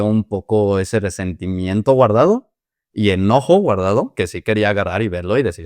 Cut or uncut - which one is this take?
uncut